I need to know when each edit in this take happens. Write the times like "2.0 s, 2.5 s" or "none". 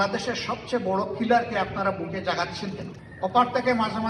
3.0 s

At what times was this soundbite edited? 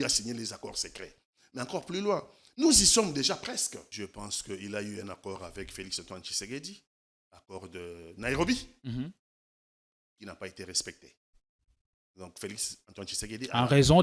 3.8 s

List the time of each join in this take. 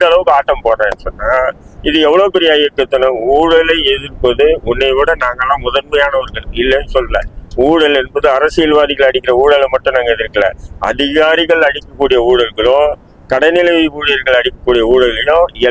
none

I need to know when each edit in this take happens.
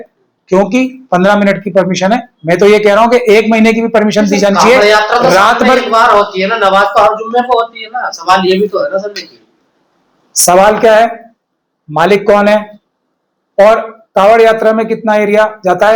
none

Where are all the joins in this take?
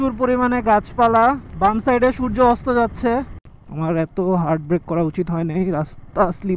3.3 s

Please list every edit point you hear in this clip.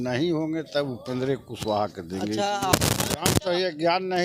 2.7 s

